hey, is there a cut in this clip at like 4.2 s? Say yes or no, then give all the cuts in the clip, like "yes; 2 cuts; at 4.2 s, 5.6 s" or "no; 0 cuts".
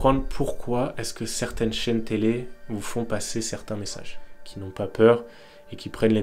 yes; 1 cut; at 4.2 s